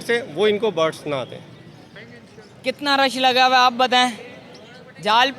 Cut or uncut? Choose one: cut